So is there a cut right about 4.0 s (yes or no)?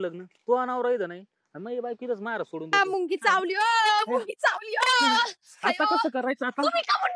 no